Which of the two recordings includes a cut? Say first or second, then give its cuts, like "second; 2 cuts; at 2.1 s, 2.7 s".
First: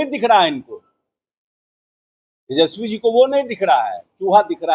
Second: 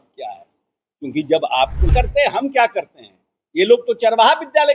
second; 1 cut; at 1.9 s